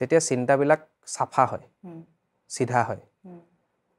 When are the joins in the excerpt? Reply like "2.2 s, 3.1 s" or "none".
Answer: none